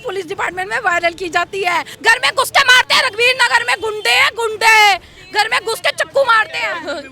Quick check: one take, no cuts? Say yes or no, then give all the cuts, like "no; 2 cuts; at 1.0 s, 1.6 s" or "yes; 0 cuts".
no; 1 cut; at 1.9 s